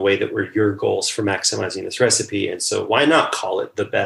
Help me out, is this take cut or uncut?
uncut